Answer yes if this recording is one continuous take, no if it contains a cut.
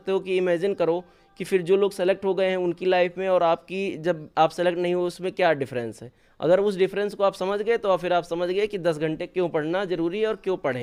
yes